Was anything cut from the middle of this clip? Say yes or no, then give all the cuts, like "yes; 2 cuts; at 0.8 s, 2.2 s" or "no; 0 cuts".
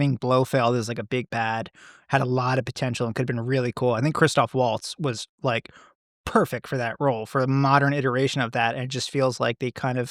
no; 0 cuts